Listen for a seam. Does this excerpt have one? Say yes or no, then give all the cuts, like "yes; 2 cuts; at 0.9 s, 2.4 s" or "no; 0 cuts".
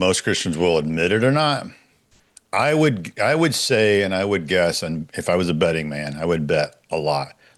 no; 0 cuts